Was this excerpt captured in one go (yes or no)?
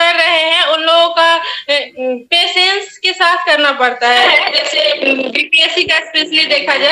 no